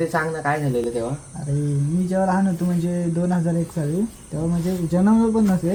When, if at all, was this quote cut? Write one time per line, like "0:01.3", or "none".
none